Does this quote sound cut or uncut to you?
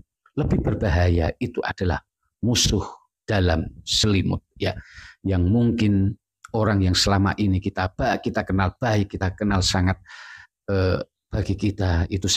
uncut